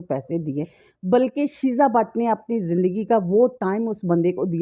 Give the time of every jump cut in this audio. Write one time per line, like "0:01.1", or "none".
none